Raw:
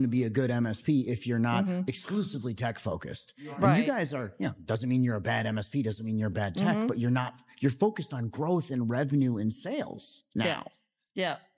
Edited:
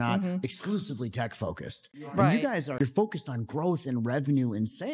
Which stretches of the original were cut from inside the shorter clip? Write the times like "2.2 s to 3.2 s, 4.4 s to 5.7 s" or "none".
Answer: 4.1 s to 7.5 s